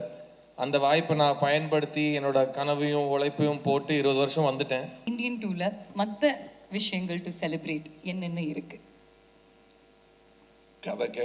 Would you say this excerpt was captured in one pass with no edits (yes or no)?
no